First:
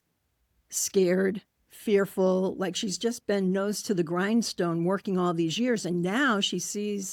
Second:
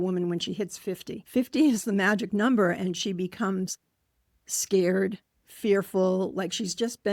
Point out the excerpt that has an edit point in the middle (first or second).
second